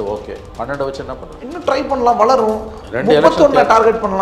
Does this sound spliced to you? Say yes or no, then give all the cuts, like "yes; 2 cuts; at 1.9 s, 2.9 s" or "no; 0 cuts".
yes; 1 cut; at 1.3 s